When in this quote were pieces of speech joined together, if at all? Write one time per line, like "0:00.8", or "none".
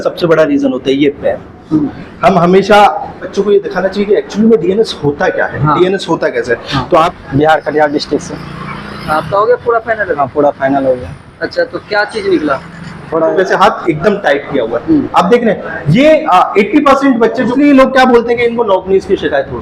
0:03.2
0:07.1
0:13.3
0:17.5